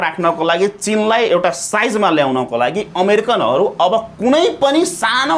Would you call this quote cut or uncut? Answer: uncut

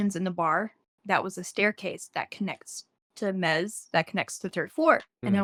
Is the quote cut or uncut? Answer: uncut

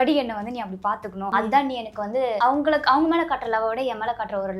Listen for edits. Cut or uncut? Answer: cut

